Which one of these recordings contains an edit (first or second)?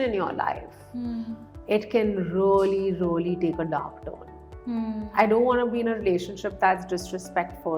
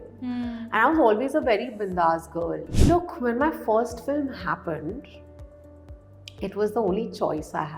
second